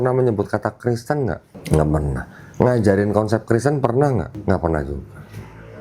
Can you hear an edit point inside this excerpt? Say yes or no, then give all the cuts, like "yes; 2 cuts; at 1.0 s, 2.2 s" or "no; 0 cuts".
yes; 2 cuts; at 1.5 s, 4.4 s